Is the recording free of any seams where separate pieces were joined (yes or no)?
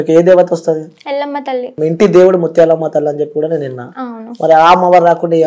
no